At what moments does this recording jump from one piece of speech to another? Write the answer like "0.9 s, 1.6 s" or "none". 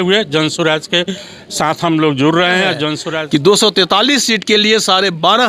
3.1 s